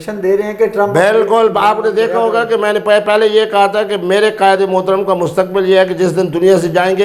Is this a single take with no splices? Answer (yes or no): yes